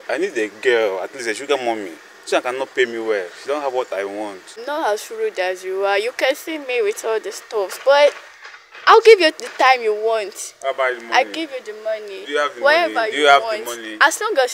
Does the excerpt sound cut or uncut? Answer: cut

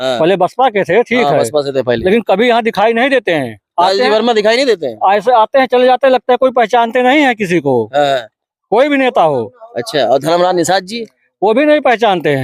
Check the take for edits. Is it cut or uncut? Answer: uncut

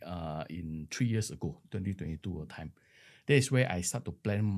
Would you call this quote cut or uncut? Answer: uncut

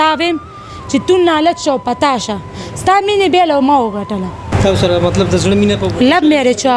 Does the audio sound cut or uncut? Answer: cut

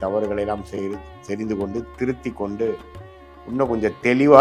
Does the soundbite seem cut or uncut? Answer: uncut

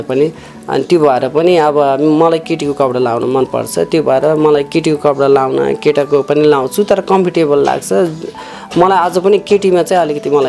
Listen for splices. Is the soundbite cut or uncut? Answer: uncut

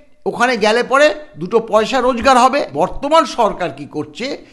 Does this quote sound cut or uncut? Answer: cut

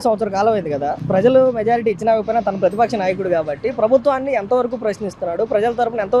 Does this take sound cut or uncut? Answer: uncut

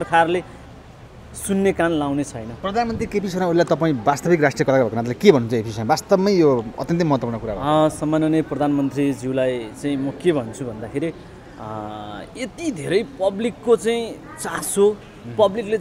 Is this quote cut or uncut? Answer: uncut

